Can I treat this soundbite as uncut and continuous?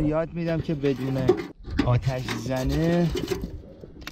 no; 1 cut; at 1.6 s

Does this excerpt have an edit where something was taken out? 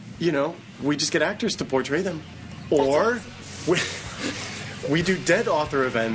yes; 1 cut; at 3.3 s

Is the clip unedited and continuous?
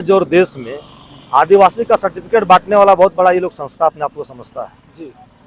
yes; 0 cuts

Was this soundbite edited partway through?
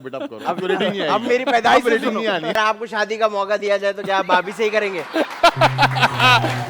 yes; 1 cut; at 2.5 s

